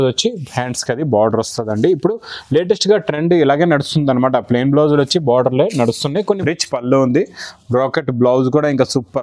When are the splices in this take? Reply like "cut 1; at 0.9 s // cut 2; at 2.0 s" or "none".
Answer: cut 1; at 6.2 s